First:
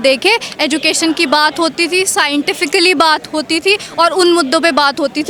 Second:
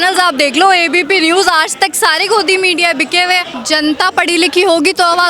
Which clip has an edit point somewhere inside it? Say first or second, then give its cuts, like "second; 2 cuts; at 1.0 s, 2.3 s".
second; 1 cut; at 3.5 s